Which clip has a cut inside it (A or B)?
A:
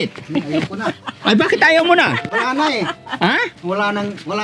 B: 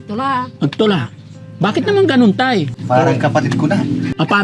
B